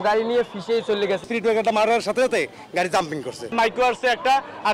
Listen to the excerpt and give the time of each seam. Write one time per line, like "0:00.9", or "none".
0:01.3
0:03.5